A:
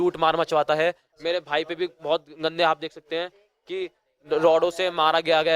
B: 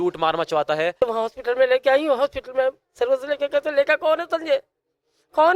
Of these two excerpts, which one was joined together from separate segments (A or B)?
B